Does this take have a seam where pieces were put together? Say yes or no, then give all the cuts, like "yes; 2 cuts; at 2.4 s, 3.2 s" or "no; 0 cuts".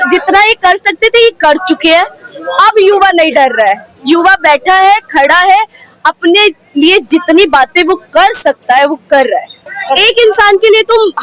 yes; 1 cut; at 9.6 s